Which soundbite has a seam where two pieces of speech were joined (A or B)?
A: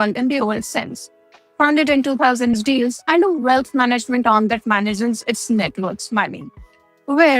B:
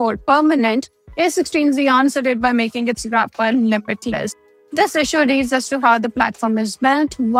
A